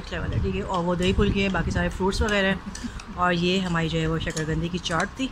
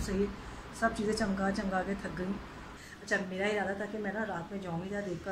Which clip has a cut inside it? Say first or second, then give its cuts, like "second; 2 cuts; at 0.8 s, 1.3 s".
second; 1 cut; at 2.9 s